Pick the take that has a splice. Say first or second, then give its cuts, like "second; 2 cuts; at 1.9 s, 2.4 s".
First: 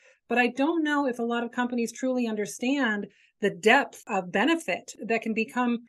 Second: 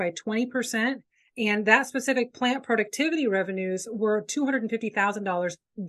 first; 2 cuts; at 4.0 s, 5.0 s